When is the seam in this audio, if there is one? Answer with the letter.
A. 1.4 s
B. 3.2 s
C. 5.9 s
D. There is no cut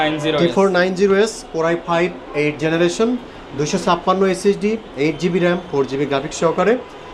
D